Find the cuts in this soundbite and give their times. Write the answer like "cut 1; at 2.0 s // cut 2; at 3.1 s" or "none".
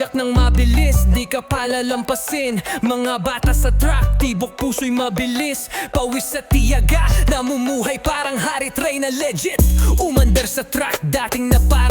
cut 1; at 9.4 s